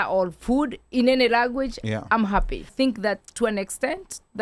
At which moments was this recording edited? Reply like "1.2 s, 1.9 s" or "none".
2.7 s